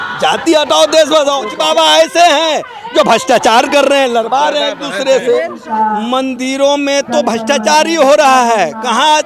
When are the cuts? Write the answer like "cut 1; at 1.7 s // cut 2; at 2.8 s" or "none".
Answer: cut 1; at 1.5 s // cut 2; at 5.6 s